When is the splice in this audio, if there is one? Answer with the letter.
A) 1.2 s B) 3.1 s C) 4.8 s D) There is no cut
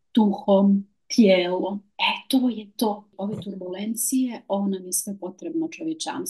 B